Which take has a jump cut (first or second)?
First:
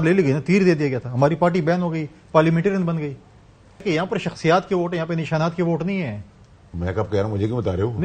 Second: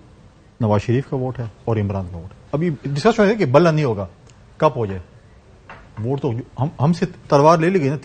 first